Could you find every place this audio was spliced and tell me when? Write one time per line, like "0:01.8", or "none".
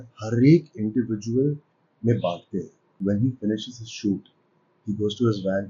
0:03.0